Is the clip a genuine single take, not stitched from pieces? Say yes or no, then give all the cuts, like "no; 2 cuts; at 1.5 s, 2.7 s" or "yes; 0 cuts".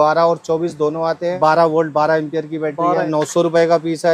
no; 2 cuts; at 1.3 s, 3.1 s